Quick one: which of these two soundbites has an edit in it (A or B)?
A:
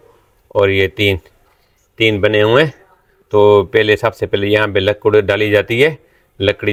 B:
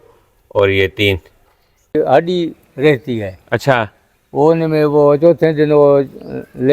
B